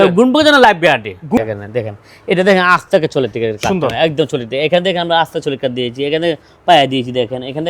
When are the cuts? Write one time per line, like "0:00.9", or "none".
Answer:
0:01.4

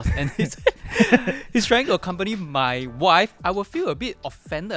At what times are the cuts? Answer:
0:03.3

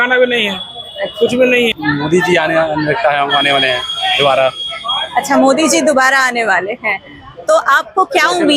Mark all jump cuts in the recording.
0:01.8

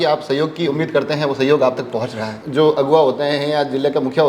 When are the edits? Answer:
0:02.3

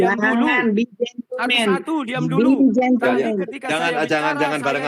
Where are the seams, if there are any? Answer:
none

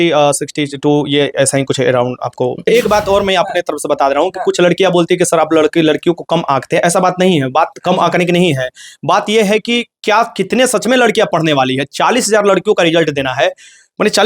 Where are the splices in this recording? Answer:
0:02.6

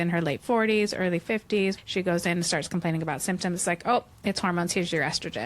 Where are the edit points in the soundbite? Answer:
0:01.8

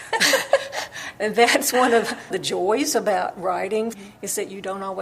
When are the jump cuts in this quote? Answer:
0:02.4
0:03.9

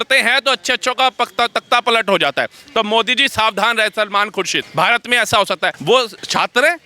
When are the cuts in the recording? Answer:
0:04.6
0:05.9

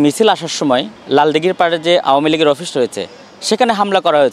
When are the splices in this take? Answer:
0:01.0

